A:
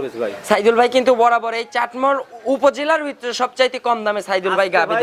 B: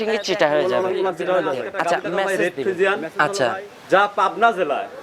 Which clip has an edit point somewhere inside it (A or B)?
B